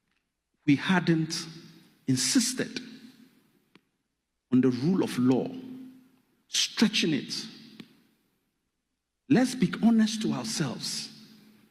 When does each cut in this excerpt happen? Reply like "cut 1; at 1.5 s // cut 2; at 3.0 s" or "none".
none